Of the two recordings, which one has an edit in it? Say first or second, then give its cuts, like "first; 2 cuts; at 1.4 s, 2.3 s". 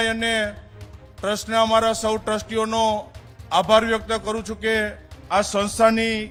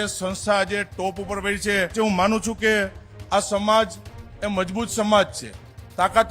second; 1 cut; at 1.9 s